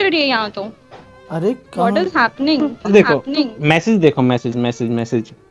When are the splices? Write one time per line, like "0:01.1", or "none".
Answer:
none